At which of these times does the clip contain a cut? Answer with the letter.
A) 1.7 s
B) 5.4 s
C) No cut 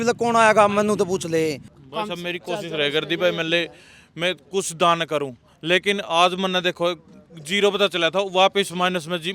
A